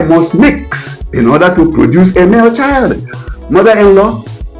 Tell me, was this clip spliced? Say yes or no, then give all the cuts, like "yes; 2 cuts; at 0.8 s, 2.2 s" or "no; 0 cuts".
yes; 1 cut; at 3.2 s